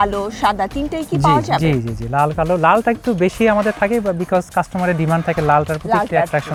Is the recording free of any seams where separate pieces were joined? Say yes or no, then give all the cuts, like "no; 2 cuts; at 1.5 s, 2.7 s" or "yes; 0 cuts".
yes; 0 cuts